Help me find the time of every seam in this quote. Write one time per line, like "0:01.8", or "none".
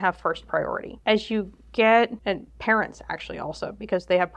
0:00.9
0:02.2